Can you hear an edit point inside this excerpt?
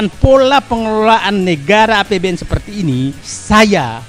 no; 0 cuts

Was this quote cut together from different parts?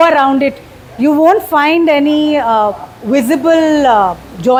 no; 0 cuts

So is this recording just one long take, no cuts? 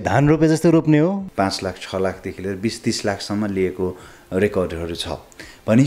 no; 1 cut; at 1.2 s

